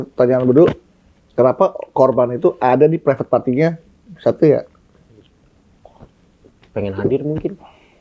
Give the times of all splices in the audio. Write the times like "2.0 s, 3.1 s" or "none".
none